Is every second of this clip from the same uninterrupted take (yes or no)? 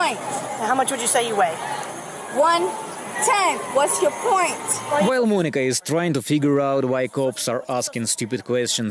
yes